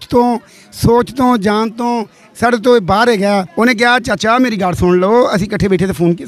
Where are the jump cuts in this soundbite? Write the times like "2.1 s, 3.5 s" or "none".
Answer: 3.5 s